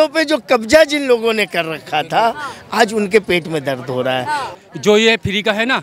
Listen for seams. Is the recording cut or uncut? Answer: cut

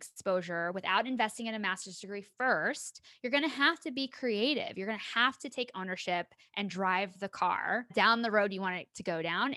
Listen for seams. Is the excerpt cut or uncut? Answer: cut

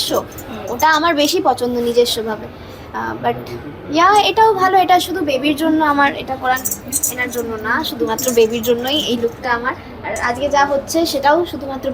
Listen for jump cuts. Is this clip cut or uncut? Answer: uncut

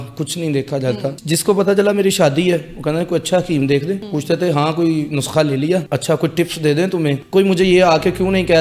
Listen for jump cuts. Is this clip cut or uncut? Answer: cut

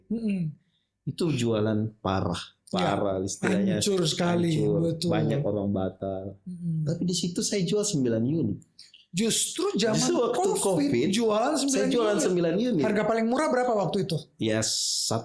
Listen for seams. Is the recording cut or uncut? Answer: uncut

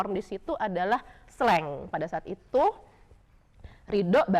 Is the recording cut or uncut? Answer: cut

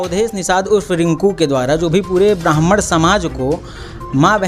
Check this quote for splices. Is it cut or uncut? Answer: uncut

